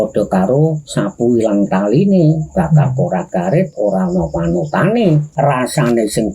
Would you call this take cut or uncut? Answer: cut